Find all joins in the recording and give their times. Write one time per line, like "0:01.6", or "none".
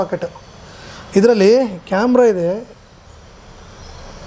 none